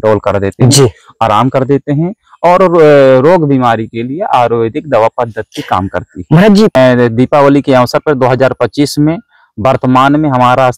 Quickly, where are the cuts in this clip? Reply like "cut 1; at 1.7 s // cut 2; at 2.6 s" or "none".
cut 1; at 6.7 s